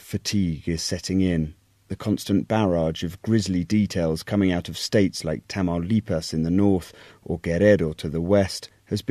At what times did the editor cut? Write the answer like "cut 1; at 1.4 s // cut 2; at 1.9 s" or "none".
none